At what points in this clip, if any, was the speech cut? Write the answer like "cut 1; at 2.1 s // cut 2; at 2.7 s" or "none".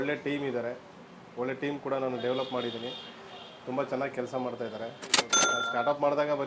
cut 1; at 5.4 s